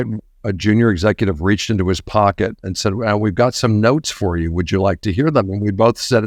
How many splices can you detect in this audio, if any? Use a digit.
0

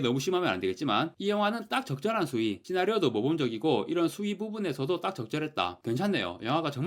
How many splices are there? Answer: 1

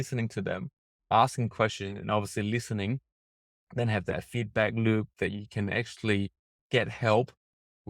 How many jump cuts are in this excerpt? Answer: 1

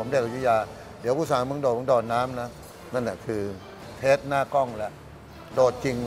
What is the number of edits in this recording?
1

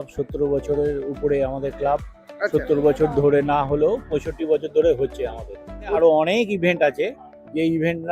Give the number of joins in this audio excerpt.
1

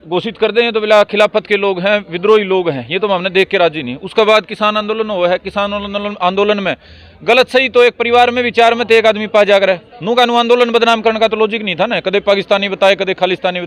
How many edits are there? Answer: 0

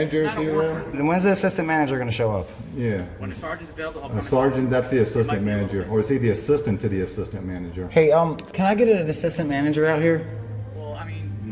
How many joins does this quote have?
2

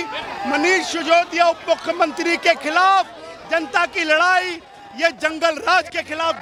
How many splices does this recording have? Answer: 0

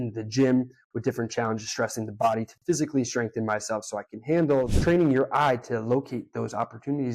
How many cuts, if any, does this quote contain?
1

